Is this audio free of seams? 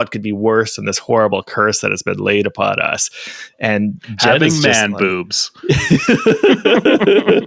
yes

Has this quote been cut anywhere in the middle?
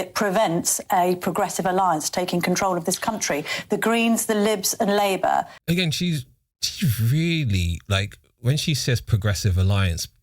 yes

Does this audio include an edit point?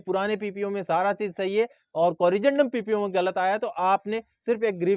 no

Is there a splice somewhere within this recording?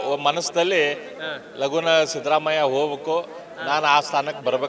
no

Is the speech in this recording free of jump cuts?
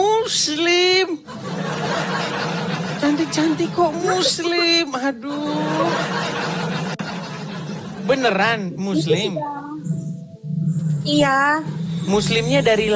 yes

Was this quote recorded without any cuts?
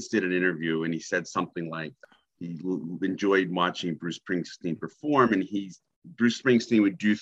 no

